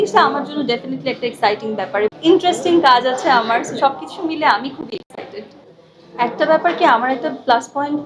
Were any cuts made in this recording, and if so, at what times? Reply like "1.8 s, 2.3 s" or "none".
2.2 s, 5.6 s

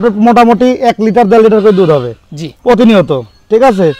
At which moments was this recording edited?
none

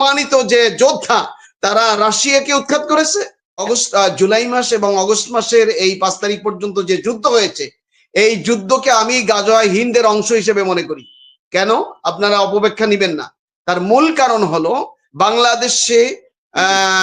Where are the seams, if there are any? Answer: 3.6 s

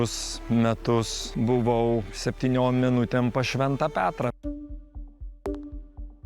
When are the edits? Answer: 1.2 s

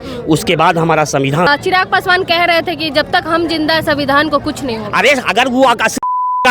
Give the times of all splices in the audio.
1.5 s

